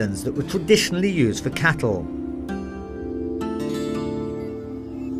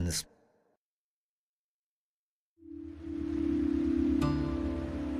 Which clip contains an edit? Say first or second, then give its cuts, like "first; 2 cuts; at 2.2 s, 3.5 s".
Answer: first; 1 cut; at 1.2 s